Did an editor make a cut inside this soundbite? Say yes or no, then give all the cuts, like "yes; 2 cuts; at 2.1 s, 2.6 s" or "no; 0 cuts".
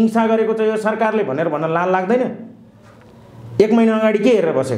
no; 0 cuts